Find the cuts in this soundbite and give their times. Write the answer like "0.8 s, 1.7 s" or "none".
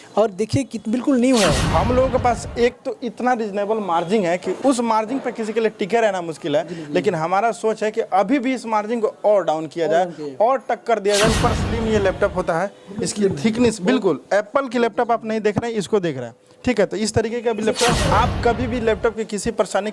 1.6 s, 4.5 s, 11.3 s, 18.0 s